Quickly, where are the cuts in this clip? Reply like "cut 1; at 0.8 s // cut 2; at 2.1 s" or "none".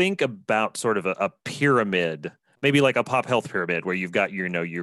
cut 1; at 2.5 s